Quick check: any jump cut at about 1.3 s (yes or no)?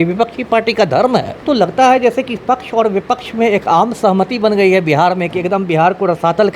yes